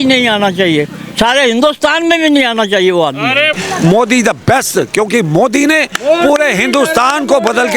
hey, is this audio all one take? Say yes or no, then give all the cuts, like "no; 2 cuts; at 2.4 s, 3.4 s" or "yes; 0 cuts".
no; 1 cut; at 3.5 s